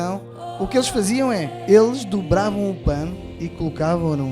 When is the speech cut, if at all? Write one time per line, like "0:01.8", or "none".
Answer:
0:01.5